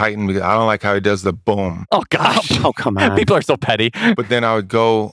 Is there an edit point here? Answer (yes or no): yes